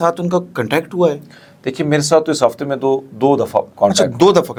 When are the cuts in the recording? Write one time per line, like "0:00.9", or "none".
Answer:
none